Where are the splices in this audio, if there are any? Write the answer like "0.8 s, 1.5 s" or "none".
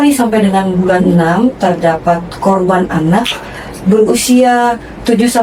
none

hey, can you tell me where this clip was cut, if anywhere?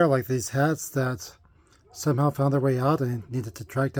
none

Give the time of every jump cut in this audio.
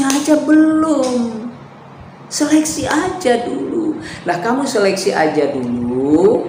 none

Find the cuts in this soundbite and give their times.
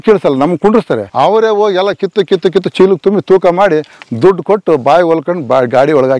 1.1 s

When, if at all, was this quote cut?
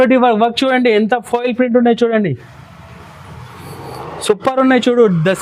none

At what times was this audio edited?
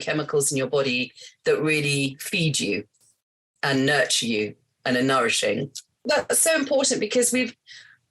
6.0 s

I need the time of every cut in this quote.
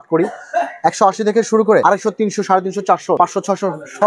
1.8 s, 3.2 s

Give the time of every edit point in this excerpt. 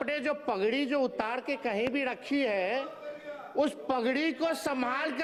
none

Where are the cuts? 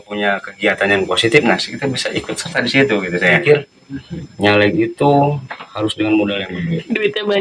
3.4 s

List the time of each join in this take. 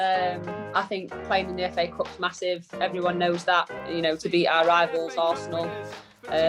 3.8 s

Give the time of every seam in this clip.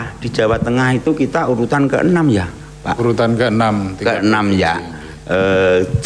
none

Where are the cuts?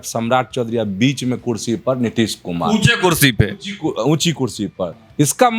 none

